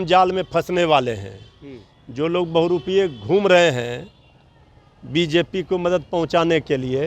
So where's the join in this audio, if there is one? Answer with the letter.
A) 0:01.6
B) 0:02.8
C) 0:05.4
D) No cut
D